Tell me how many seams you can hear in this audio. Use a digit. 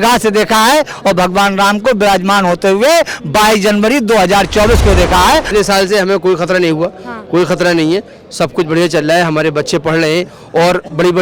1